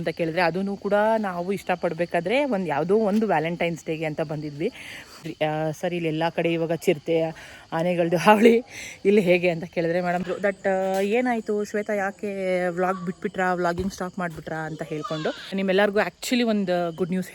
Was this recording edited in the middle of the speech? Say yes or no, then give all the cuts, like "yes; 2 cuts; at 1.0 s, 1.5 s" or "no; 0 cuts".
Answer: yes; 3 cuts; at 5.3 s, 10.3 s, 15.5 s